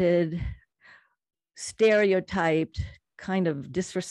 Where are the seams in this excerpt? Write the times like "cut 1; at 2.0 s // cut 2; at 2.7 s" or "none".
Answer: none